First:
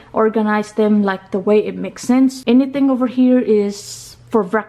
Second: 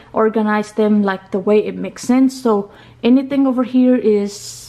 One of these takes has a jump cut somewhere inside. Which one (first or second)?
first